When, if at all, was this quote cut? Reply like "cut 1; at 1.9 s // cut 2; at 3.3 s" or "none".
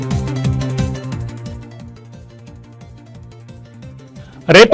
cut 1; at 3.4 s